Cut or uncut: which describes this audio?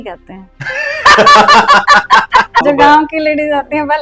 cut